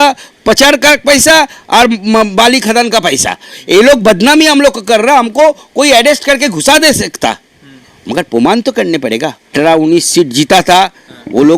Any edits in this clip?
yes; 1 cut; at 9.5 s

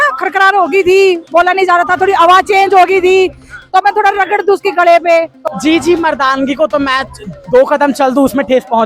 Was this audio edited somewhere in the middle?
yes; 1 cut; at 5.4 s

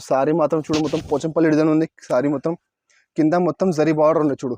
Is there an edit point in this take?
no; 0 cuts

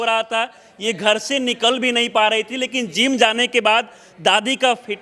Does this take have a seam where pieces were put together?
no; 0 cuts

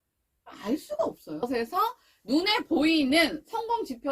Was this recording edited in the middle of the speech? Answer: yes; 1 cut; at 1.4 s

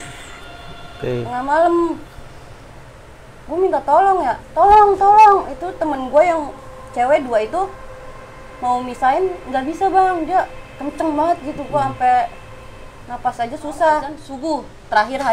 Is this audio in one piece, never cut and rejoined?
no; 1 cut; at 14.2 s

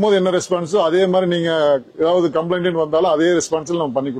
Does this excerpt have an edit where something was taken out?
no; 0 cuts

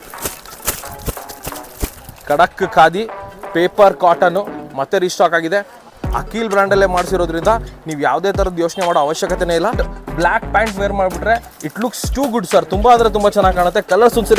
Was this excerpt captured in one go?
no; 2 cuts; at 5.9 s, 9.9 s

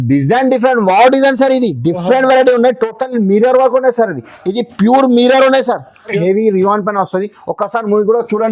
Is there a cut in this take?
yes; 1 cut; at 6.2 s

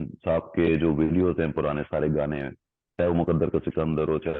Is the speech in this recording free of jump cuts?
yes; 0 cuts

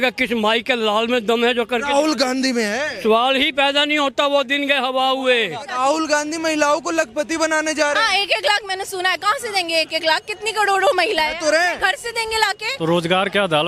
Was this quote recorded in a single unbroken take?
no; 2 cuts; at 5.7 s, 12.7 s

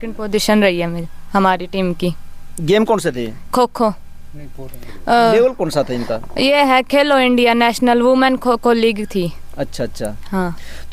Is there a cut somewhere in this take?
no; 0 cuts

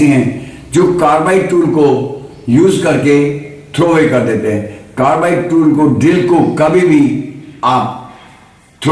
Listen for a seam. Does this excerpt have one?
no; 0 cuts

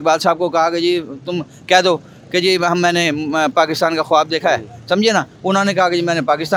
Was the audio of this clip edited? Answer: no; 0 cuts

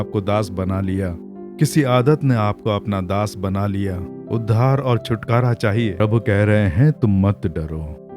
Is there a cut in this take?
yes; 1 cut; at 6.0 s

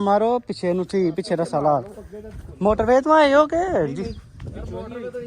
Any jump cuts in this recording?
no; 0 cuts

